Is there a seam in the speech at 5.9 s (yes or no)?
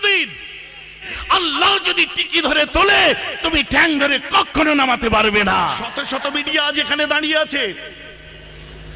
yes